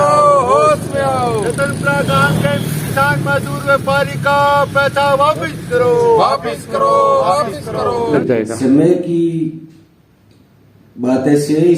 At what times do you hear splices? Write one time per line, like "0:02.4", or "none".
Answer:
0:08.1